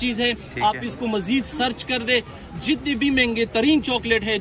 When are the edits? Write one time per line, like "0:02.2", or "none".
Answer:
none